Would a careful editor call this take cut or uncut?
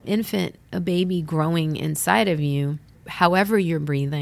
cut